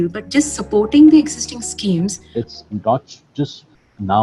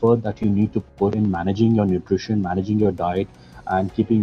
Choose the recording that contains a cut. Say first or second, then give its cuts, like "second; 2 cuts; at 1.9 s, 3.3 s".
first; 1 cut; at 2.3 s